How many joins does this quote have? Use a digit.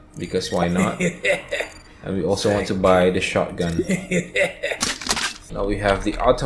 1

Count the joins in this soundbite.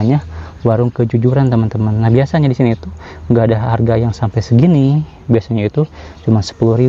0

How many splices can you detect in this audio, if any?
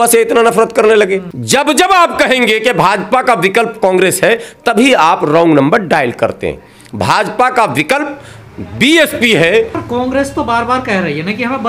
2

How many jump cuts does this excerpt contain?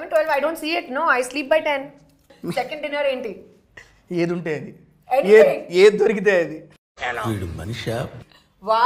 1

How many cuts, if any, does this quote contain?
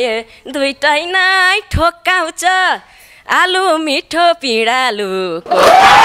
0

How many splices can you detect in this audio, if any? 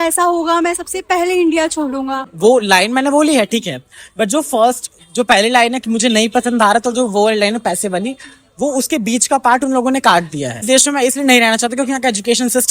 2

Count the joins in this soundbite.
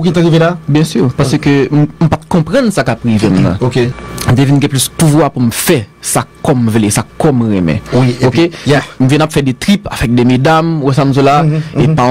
1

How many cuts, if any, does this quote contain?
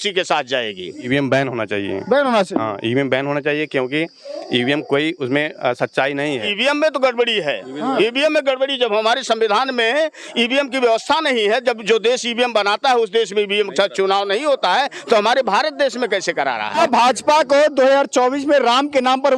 3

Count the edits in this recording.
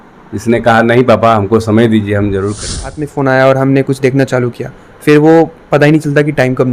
1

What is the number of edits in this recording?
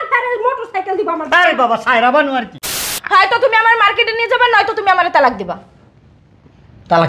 1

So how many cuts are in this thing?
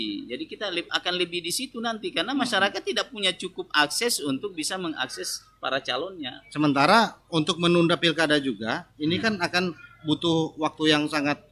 0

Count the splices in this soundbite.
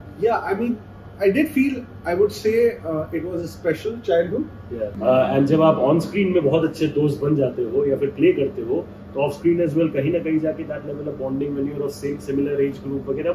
1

